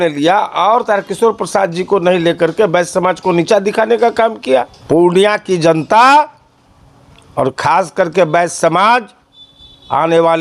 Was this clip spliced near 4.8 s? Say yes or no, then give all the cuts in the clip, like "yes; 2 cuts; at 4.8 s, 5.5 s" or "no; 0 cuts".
yes; 1 cut; at 4.8 s